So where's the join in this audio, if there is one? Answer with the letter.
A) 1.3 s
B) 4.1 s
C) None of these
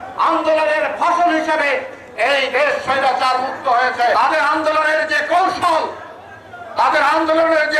B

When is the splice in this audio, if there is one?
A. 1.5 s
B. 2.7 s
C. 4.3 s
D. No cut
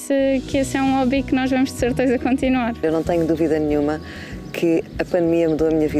B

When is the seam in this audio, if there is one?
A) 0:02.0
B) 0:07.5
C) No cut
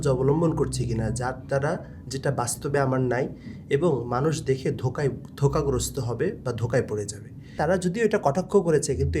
B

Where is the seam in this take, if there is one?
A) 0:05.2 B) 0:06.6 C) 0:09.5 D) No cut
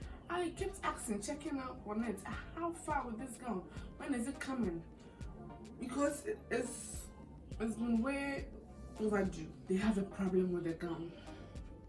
C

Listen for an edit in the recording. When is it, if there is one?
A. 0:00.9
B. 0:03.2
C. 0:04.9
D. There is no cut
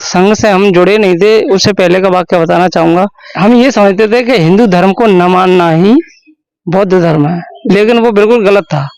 B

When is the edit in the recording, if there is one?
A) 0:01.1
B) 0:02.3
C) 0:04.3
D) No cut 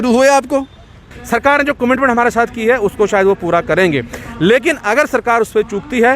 A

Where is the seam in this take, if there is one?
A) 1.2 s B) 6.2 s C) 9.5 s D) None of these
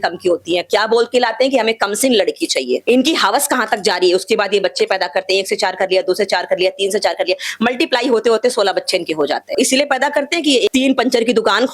C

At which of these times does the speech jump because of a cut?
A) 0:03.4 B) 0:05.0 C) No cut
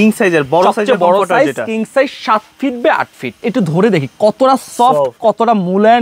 A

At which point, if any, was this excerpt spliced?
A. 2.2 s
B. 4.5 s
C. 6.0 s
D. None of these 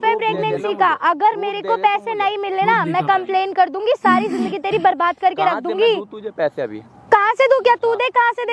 D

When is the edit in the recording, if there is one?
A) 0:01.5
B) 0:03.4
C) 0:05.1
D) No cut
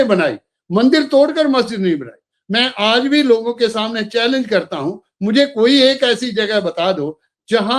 D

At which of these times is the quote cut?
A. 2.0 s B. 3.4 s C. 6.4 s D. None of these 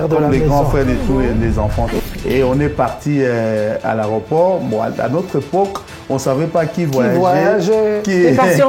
A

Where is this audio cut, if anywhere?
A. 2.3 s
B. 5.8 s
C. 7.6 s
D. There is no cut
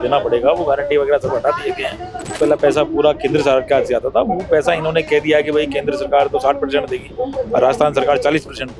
A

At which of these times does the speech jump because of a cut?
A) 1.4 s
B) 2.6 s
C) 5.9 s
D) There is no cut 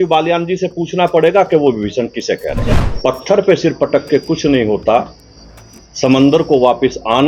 B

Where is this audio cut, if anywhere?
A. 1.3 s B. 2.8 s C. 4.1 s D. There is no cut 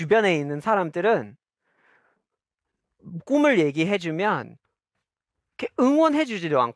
D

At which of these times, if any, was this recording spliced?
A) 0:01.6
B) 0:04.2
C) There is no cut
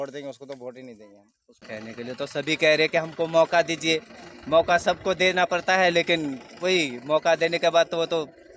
A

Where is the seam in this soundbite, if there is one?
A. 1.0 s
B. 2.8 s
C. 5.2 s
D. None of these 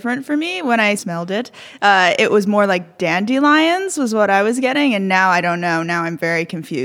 A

